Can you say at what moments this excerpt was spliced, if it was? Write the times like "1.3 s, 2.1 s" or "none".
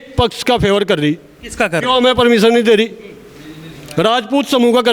none